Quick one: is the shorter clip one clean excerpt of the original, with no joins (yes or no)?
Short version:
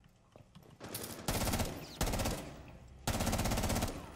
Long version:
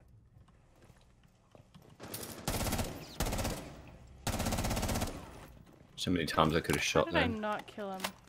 yes